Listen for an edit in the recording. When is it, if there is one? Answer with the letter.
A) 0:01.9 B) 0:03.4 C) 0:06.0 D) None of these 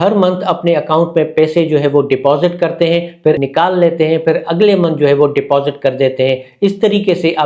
B